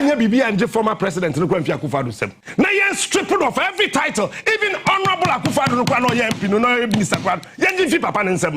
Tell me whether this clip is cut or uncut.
cut